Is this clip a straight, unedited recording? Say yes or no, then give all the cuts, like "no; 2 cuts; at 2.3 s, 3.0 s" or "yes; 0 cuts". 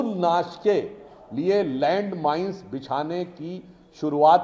yes; 0 cuts